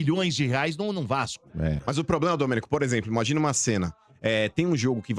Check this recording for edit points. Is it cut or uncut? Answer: cut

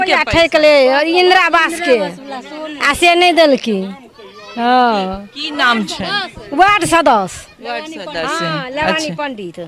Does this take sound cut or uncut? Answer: uncut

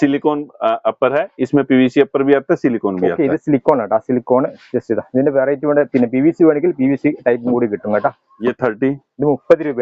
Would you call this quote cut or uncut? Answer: cut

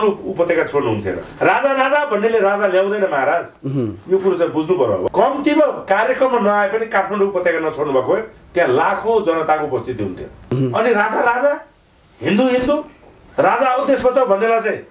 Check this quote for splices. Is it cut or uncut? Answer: cut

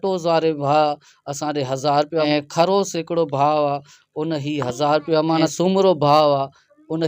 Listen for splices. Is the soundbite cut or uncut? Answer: cut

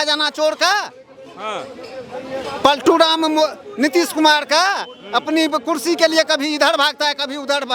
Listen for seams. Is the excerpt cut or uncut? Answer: uncut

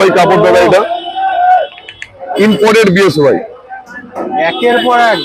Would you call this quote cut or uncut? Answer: uncut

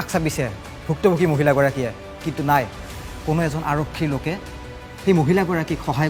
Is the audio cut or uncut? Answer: uncut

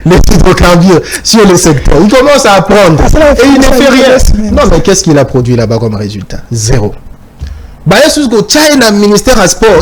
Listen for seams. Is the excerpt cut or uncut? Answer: uncut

